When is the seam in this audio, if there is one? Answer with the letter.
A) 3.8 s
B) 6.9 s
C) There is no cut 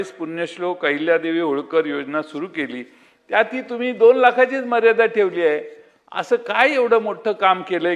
C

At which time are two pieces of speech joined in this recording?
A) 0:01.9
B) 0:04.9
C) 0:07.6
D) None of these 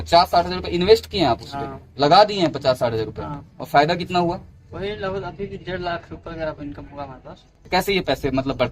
C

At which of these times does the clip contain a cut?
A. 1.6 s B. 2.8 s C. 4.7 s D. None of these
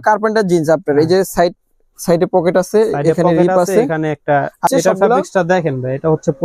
C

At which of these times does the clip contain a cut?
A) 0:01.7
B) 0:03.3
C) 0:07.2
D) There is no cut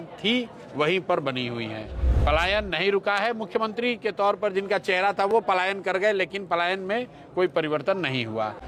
D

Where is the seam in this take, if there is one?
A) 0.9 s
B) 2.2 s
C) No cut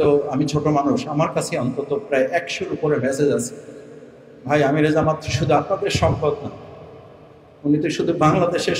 C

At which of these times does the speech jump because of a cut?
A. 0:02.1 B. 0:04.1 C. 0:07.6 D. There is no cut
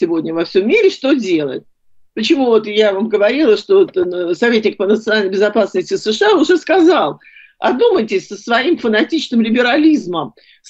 D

